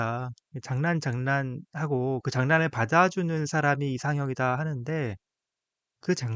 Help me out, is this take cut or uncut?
uncut